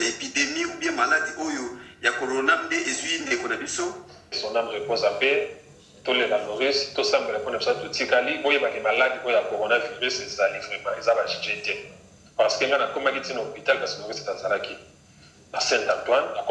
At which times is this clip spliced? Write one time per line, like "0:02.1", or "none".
0:04.4